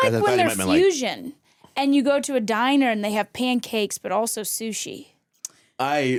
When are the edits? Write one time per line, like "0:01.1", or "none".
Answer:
none

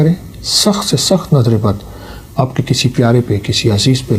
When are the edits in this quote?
none

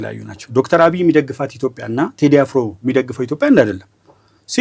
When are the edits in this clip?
none

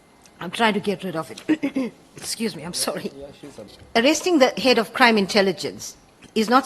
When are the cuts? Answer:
0:03.7

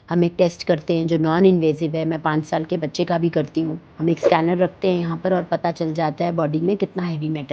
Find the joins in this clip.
0:03.9

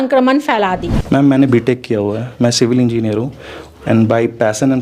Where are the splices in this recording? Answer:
0:00.9

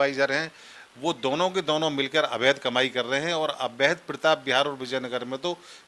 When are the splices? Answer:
none

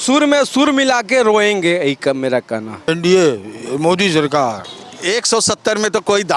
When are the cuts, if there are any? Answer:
0:02.9
0:04.6

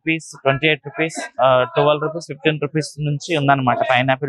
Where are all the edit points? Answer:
none

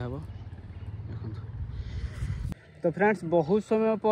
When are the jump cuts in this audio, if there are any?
0:02.5

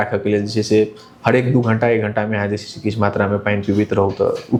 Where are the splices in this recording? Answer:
none

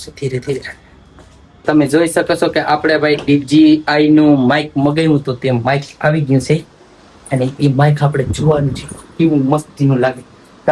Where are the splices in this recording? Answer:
0:01.6

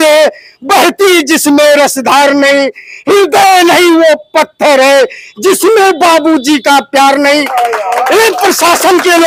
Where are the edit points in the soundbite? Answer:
none

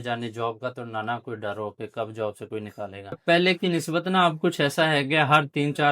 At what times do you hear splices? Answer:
0:03.2

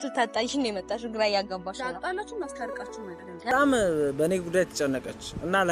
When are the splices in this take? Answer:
0:03.5

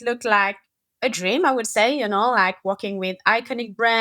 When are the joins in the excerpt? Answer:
none

